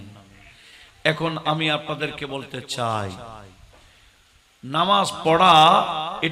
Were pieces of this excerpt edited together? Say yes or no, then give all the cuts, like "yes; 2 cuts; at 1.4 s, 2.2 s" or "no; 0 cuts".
no; 0 cuts